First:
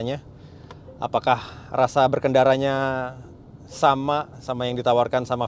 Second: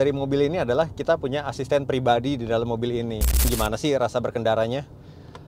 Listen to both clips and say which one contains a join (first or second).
second